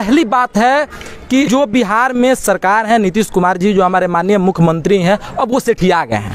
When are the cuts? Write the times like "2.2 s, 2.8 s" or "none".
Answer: 1.5 s

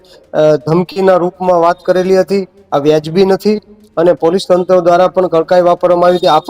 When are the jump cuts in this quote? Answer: none

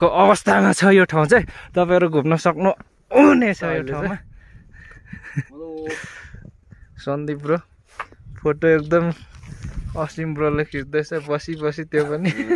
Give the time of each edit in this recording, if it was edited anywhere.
4.0 s

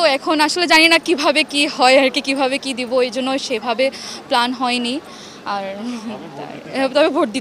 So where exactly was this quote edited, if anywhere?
none

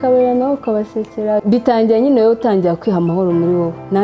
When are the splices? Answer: 1.4 s

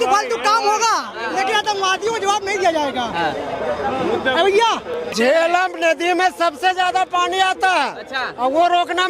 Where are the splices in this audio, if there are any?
5.0 s

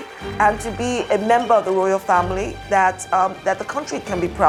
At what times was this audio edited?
none

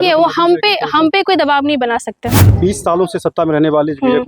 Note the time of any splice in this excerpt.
2.4 s

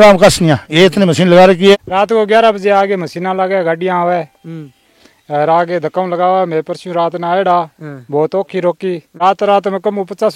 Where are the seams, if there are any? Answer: 1.7 s, 9.1 s

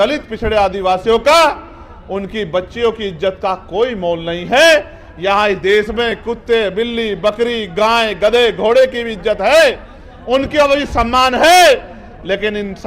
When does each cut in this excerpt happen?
none

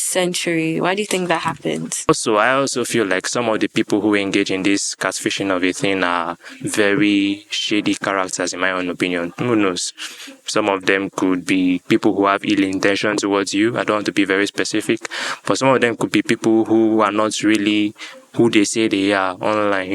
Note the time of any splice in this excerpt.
2.1 s

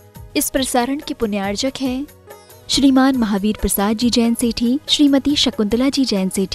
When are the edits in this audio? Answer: none

